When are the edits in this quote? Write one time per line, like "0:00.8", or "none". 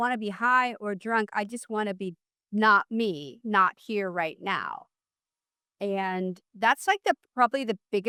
none